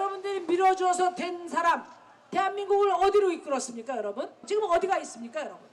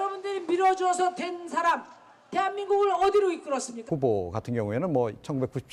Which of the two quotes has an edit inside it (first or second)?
first